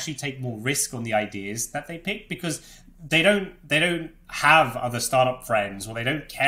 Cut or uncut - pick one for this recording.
uncut